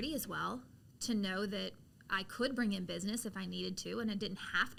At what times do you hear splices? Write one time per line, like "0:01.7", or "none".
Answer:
none